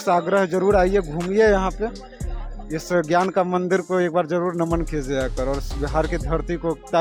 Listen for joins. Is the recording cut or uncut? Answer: uncut